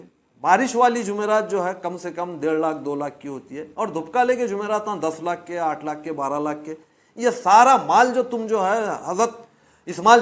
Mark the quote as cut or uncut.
uncut